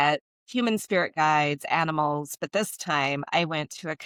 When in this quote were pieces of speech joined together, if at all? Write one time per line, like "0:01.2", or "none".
none